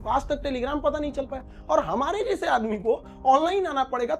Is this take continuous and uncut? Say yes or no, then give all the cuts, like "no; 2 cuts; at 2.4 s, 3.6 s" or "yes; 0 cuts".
yes; 0 cuts